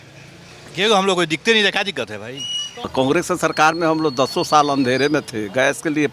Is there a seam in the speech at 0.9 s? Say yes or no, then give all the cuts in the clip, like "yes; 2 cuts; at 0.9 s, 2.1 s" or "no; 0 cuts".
no; 1 cut; at 2.9 s